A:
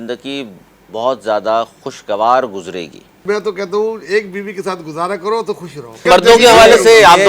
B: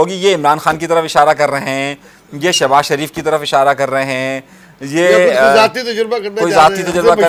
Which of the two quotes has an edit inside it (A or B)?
A